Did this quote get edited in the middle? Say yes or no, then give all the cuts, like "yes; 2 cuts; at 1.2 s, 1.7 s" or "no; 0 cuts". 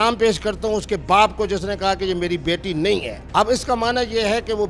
yes; 1 cut; at 3.2 s